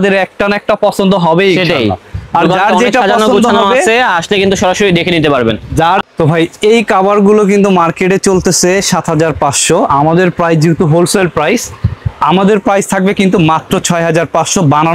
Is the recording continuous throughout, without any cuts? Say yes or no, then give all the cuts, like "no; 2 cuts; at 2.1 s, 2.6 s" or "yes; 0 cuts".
no; 1 cut; at 6.0 s